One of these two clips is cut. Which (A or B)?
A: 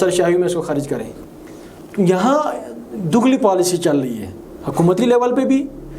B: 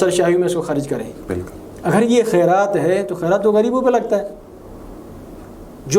A